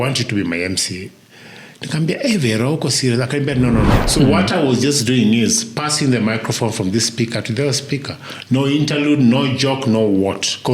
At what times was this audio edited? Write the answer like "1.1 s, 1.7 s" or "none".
4.0 s